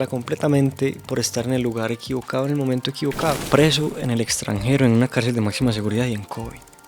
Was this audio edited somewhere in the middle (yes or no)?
yes